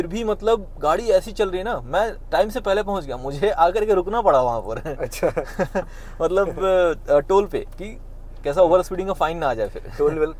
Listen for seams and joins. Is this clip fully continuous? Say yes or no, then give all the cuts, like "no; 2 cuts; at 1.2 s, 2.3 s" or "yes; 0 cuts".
yes; 0 cuts